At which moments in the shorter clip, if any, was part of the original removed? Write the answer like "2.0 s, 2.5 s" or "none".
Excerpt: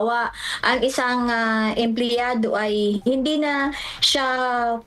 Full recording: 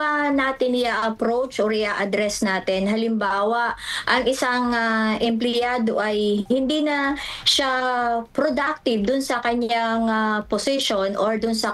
none